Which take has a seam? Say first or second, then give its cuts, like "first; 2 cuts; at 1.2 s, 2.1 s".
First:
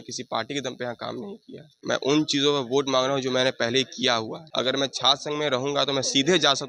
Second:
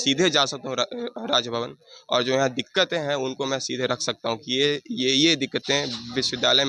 first; 2 cuts; at 1.8 s, 4.4 s